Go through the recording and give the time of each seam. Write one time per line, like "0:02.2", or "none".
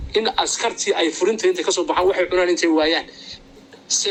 none